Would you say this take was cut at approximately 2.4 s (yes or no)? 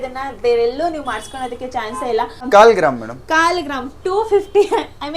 yes